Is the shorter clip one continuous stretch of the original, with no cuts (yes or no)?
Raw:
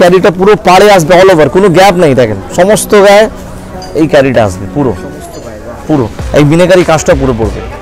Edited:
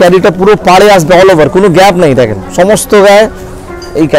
yes